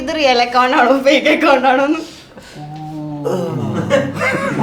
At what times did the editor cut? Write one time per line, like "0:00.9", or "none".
none